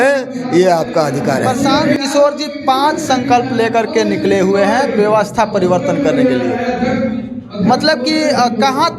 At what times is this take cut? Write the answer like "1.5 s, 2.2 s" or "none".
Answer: 2.0 s